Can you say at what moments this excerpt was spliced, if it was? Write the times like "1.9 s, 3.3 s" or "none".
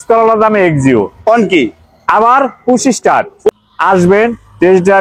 3.5 s

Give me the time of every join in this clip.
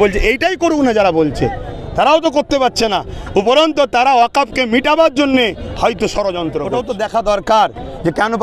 6.7 s

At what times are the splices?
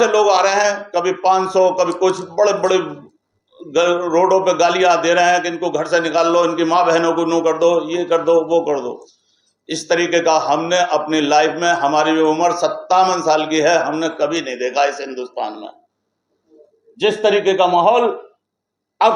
none

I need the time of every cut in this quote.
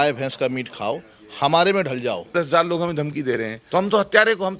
2.3 s, 3.6 s

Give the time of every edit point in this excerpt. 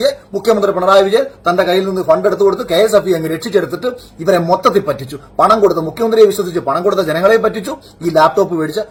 none

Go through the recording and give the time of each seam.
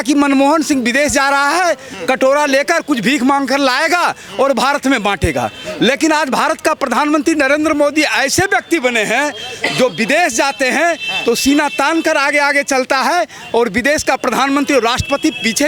none

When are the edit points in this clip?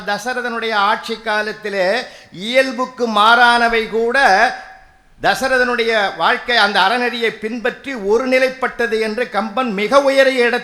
none

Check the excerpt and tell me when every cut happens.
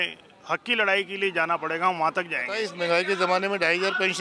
2.7 s

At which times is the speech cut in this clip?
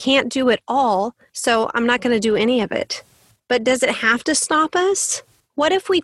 none

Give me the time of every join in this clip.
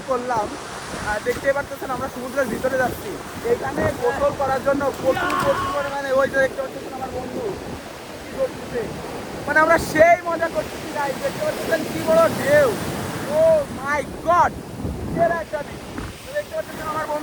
none

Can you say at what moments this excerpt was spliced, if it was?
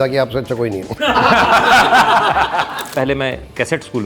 2.8 s

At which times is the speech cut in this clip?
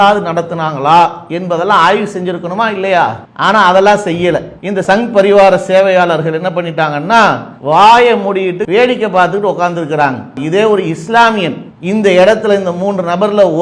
8.6 s, 10.4 s

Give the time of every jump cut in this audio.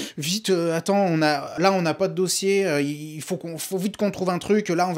1.5 s

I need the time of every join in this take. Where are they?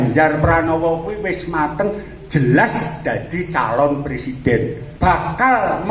4.8 s

